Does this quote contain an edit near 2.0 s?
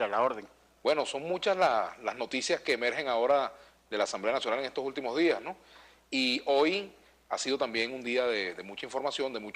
yes; 1 cut; at 2.0 s

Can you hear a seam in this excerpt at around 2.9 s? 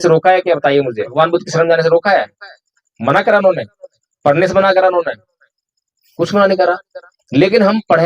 no; 1 cut; at 1.0 s

